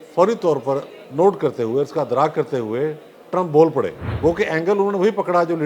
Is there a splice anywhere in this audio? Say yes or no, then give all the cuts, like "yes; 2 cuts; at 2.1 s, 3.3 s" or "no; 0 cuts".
yes; 2 cuts; at 1.0 s, 4.0 s